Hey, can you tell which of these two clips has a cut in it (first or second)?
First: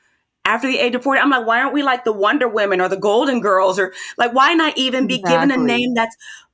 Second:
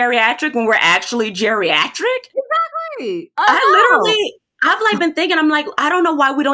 second